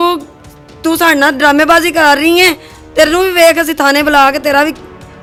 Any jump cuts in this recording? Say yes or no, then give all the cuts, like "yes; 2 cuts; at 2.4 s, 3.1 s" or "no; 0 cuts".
no; 0 cuts